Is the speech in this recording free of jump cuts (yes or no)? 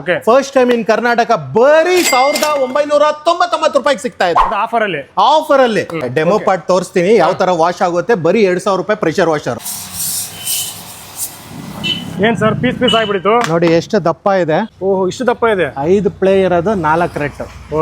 no